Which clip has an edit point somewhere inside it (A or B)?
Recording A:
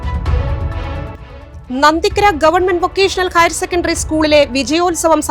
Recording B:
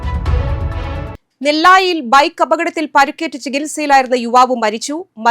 B